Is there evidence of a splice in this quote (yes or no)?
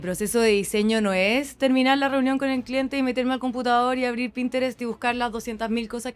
no